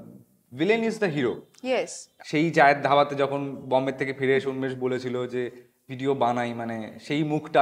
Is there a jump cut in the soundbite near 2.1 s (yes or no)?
yes